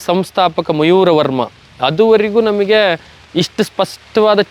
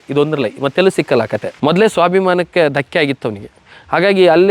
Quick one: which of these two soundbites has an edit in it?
second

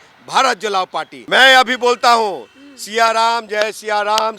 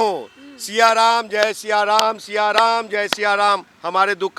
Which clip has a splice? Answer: first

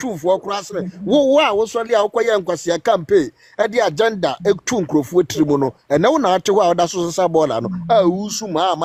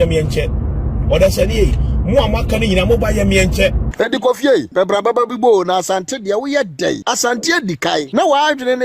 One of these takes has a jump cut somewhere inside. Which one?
second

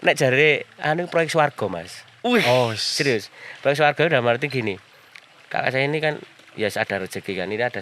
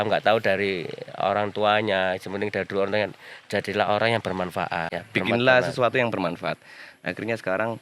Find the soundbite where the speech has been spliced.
second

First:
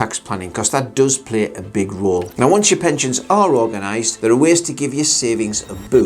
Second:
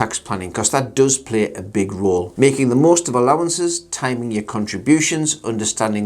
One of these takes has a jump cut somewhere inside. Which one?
first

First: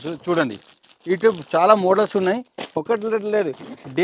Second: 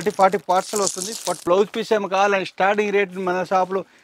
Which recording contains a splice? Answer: second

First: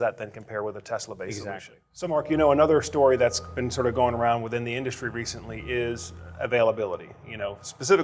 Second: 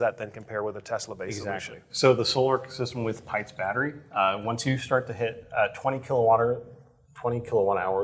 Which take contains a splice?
first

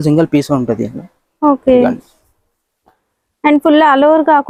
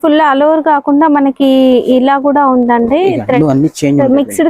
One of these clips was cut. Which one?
second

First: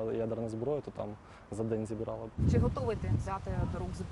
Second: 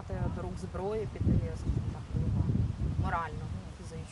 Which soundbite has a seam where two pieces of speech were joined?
first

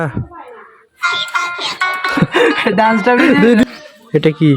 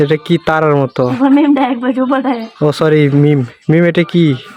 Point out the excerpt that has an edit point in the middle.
first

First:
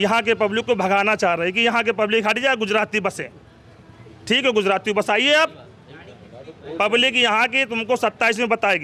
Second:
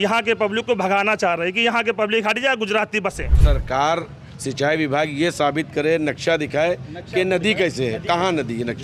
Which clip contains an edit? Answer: second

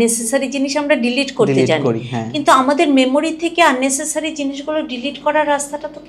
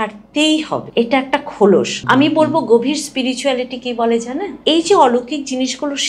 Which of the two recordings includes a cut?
second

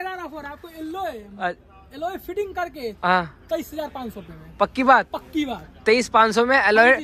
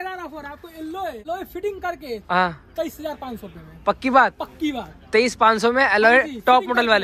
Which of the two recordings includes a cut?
second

